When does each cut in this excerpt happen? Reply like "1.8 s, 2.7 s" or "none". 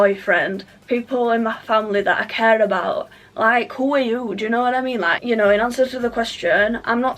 5.2 s